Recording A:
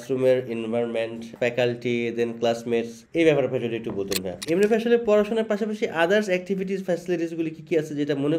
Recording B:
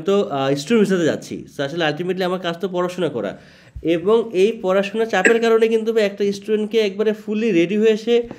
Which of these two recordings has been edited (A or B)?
A